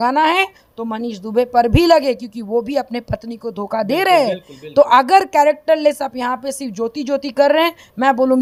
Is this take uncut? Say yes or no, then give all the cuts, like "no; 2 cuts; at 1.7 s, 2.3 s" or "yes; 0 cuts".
yes; 0 cuts